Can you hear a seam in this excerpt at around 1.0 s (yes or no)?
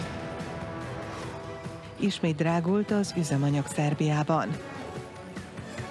yes